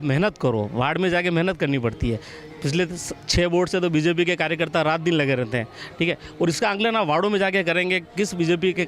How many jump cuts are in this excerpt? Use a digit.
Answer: 0